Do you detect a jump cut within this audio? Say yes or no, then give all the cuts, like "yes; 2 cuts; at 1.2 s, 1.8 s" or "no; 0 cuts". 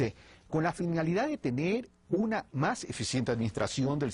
no; 0 cuts